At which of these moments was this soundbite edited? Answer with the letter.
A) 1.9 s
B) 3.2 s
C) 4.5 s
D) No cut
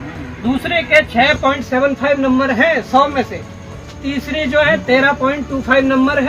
D